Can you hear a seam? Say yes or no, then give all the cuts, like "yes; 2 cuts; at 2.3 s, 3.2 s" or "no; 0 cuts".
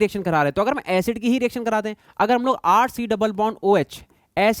no; 0 cuts